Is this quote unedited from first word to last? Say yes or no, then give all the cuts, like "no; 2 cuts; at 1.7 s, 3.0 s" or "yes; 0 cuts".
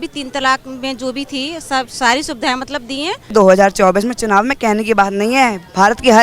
no; 1 cut; at 3.3 s